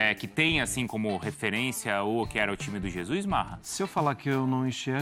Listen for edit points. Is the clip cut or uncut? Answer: uncut